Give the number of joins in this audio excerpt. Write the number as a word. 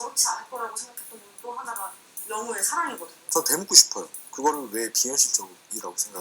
one